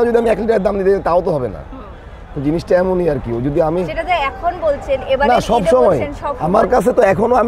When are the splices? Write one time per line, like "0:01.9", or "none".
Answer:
none